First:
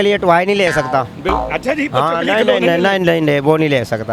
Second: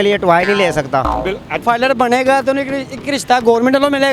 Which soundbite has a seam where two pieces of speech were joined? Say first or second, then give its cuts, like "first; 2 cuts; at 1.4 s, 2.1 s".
second; 1 cut; at 1.6 s